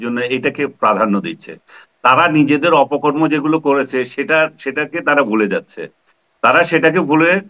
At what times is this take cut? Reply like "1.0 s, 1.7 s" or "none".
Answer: none